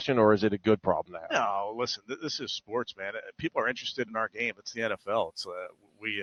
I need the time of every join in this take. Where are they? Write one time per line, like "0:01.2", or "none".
none